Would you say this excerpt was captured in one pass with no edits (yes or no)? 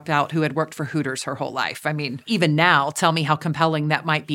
no